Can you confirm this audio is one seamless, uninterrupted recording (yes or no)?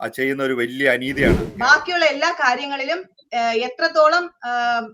no